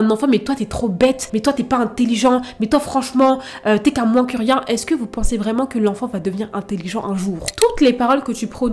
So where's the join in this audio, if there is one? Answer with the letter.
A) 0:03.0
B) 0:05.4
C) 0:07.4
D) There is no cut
C